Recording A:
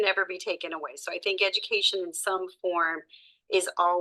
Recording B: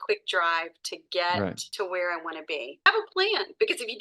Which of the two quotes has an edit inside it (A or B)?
B